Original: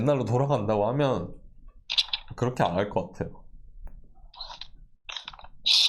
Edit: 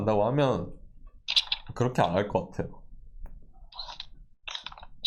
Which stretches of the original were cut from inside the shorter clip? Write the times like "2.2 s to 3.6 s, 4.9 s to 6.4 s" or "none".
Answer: none